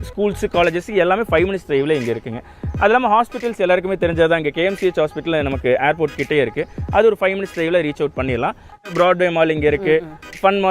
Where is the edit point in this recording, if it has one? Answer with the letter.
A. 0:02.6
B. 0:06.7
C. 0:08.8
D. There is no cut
C